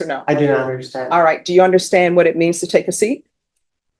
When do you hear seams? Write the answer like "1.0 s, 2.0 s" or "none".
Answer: none

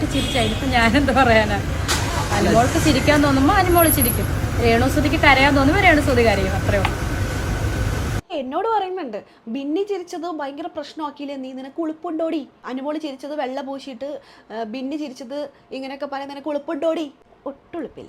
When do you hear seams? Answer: 8.3 s, 12.7 s, 17.2 s

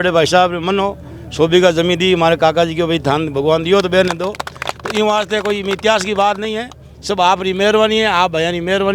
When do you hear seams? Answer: none

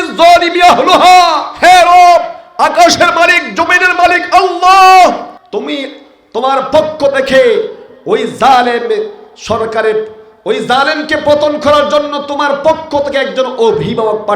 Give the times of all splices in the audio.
1.4 s, 5.3 s

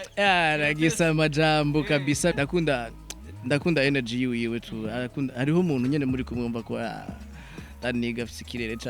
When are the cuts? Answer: 2.3 s

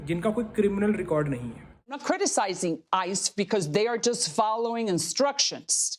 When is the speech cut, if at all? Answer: 2.0 s

